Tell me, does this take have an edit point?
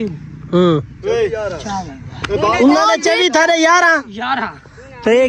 no; 0 cuts

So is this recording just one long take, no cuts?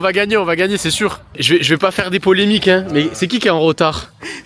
no; 1 cut; at 1.3 s

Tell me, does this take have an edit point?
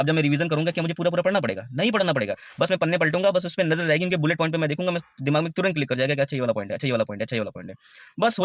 no; 0 cuts

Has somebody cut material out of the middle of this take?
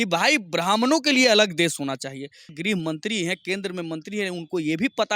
yes; 1 cut; at 2.6 s

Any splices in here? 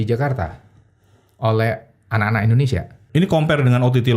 yes; 1 cut; at 3.0 s

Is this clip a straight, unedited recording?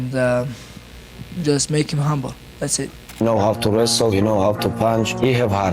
no; 1 cut; at 3.2 s

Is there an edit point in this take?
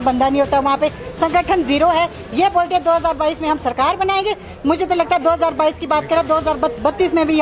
no; 0 cuts

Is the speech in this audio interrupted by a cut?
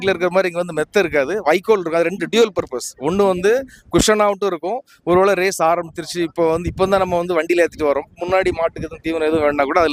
no; 0 cuts

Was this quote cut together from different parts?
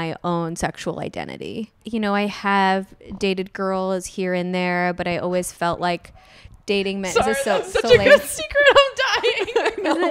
yes; 1 cut; at 1.8 s

